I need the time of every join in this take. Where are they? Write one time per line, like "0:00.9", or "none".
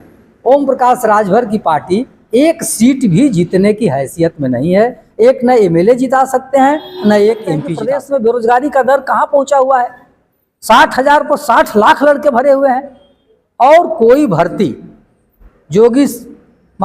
0:07.7